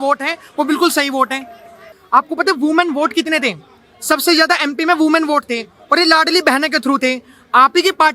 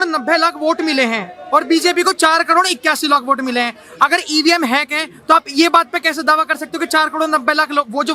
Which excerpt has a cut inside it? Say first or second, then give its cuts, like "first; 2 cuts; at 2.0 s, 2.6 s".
first; 1 cut; at 1.8 s